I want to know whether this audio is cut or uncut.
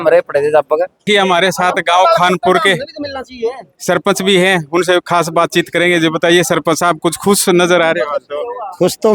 uncut